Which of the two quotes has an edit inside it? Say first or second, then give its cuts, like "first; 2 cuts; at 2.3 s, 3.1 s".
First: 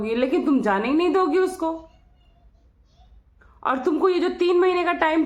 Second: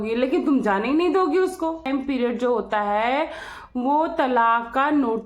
second; 1 cut; at 1.9 s